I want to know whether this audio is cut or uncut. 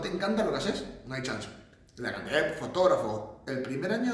uncut